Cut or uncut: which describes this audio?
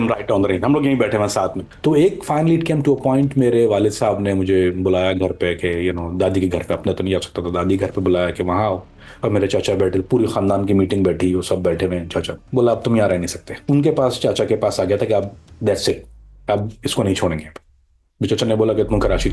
cut